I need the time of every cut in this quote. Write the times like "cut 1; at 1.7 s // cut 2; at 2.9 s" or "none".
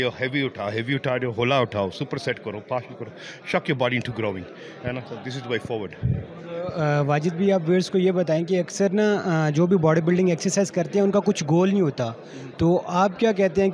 none